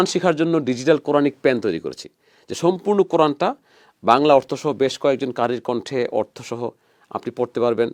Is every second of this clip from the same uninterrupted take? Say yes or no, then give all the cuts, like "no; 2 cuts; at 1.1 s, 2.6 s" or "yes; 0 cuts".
yes; 0 cuts